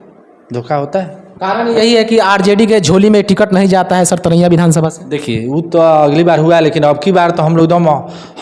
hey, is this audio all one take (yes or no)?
yes